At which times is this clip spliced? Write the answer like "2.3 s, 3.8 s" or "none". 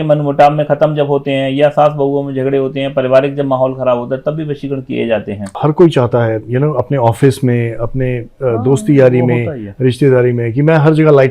5.5 s